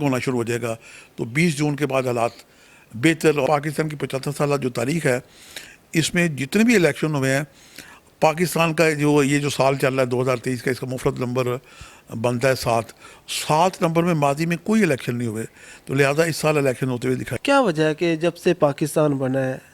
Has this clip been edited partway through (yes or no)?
yes